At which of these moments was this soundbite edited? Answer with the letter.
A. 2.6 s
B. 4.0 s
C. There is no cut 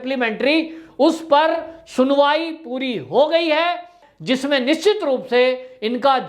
B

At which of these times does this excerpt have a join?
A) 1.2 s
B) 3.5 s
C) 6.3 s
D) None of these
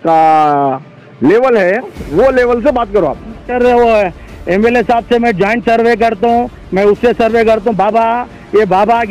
B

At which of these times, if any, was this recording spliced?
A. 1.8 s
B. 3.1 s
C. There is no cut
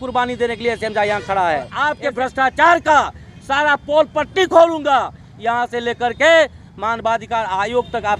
A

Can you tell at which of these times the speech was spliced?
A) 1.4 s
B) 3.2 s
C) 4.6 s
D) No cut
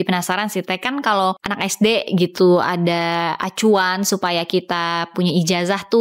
A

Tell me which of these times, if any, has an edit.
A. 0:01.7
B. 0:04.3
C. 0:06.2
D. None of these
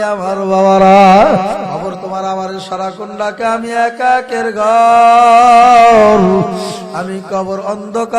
A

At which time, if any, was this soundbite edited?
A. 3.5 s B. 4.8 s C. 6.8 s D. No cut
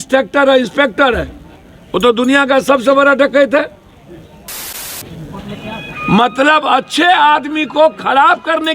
B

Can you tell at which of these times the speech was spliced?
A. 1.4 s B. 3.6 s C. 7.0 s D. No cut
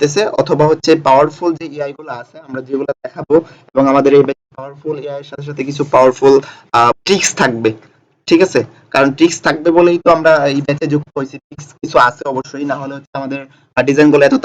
C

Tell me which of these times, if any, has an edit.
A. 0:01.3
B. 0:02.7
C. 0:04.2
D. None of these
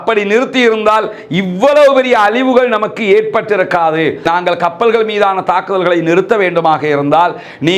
C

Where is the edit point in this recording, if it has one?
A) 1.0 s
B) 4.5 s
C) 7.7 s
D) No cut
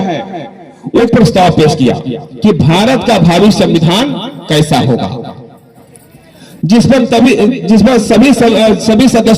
A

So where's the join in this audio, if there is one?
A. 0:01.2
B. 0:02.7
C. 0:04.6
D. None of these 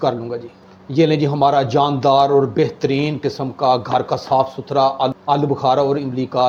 D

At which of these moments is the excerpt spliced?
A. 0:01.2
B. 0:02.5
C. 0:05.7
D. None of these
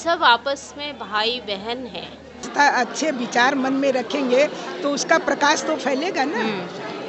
B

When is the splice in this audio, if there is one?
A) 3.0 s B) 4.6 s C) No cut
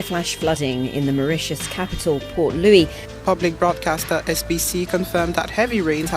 A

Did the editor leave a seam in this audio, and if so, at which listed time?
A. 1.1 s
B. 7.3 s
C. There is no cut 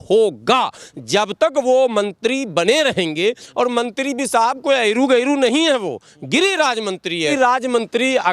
B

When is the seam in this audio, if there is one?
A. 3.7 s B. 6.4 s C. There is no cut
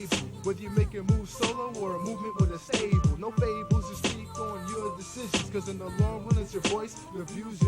B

